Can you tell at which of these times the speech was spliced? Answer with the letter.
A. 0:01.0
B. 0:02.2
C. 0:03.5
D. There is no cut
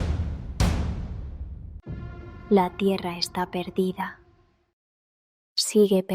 B